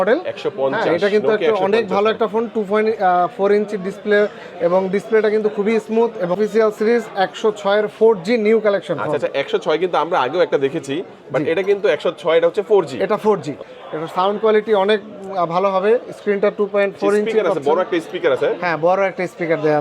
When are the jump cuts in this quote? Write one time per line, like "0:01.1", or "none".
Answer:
0:06.3
0:13.6